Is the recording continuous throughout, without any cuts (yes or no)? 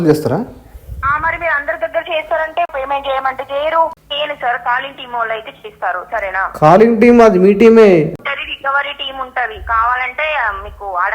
no